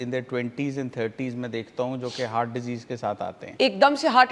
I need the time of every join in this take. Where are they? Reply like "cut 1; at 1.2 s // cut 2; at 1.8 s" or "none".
cut 1; at 3.4 s